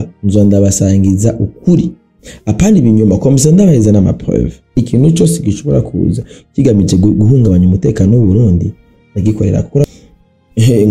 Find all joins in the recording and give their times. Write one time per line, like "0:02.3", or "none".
0:04.8
0:09.8